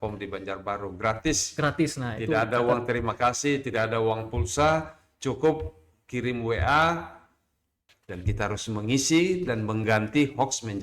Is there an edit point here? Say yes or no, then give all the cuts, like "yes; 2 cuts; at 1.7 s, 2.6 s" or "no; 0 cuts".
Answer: yes; 1 cut; at 7.9 s